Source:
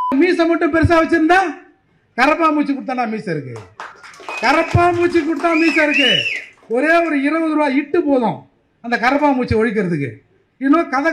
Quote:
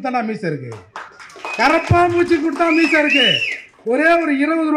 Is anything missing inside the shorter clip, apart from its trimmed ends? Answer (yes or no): no